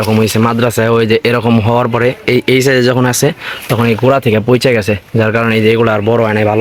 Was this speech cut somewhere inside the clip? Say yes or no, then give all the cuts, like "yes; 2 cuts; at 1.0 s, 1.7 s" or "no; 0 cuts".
no; 0 cuts